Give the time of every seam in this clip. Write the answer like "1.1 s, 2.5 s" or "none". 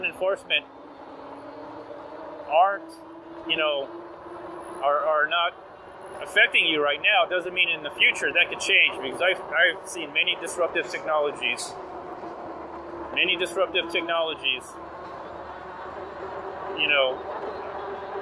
none